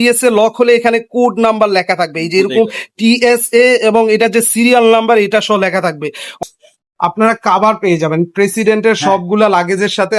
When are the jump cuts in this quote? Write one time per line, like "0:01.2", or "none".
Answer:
0:06.4